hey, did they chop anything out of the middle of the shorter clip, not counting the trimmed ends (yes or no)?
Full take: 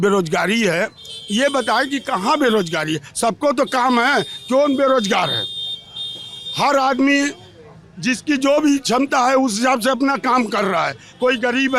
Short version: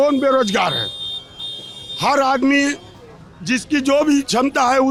no